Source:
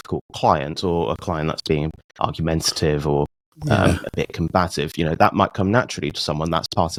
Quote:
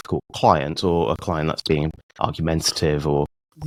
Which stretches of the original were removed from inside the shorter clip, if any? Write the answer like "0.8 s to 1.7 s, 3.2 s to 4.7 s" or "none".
none